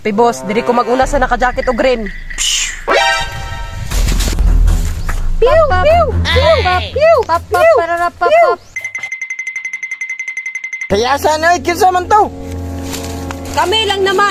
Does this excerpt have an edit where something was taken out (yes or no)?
yes